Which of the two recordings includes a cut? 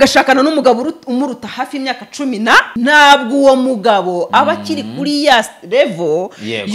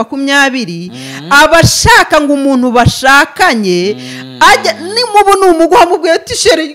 first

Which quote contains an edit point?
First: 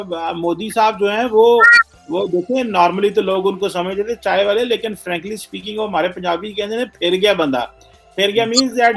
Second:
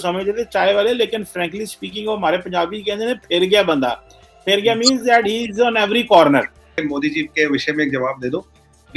second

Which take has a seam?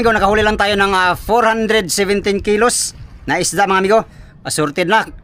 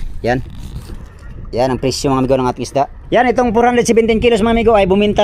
second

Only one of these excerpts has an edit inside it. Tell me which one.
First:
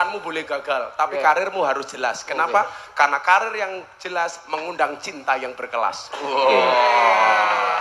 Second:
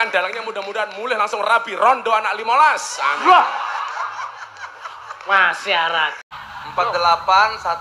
second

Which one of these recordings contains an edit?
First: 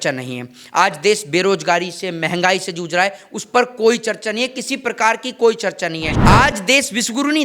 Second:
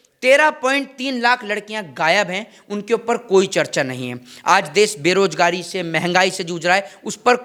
first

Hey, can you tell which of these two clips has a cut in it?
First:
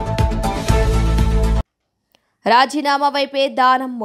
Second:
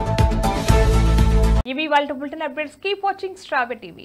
first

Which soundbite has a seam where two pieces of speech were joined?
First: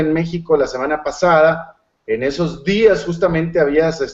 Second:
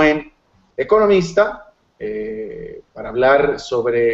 first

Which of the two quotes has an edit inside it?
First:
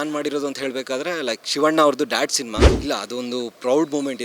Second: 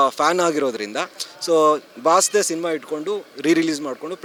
first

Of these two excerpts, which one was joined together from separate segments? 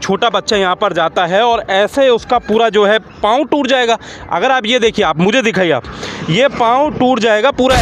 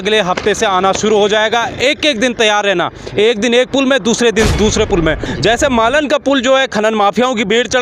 second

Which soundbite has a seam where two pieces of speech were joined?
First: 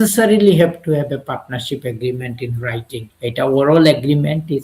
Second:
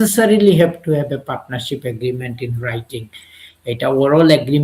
first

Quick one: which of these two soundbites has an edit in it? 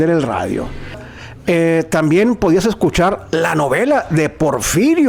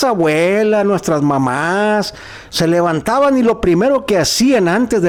first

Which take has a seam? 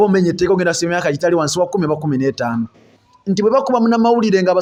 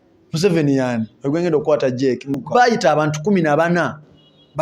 second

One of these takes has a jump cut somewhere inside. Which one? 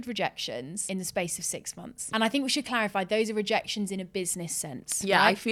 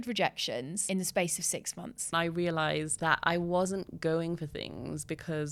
second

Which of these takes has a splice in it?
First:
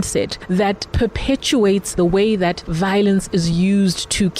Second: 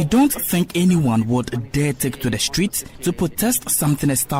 first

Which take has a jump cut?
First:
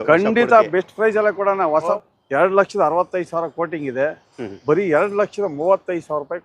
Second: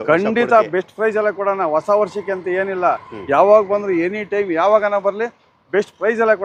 first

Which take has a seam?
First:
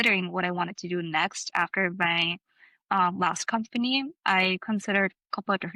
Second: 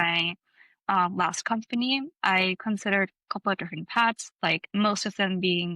second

